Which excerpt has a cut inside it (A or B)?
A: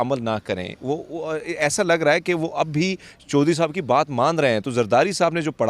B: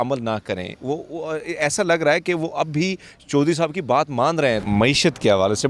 B